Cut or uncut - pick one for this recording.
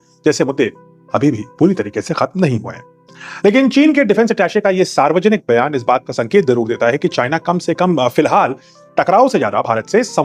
uncut